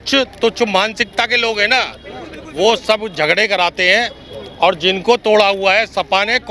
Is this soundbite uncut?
yes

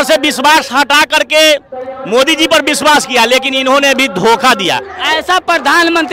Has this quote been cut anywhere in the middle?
yes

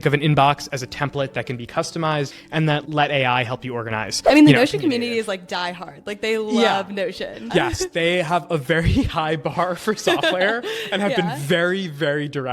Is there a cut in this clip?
yes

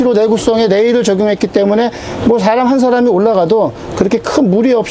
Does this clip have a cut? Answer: no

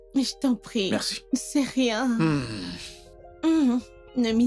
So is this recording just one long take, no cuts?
yes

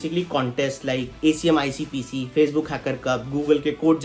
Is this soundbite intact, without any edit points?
no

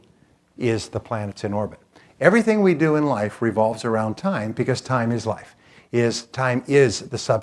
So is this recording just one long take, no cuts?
yes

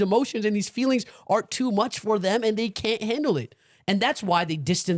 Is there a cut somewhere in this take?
no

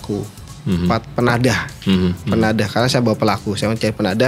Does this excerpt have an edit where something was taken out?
no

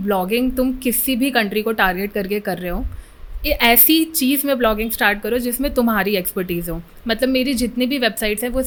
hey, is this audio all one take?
yes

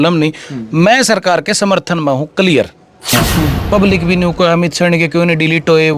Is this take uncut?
no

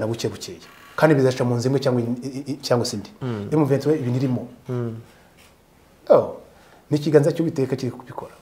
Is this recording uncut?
yes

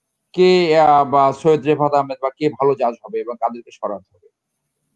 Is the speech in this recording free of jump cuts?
yes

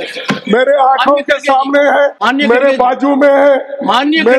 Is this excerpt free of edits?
no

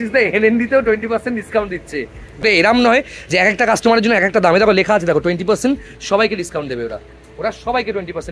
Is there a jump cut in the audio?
yes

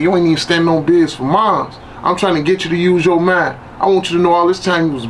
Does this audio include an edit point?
no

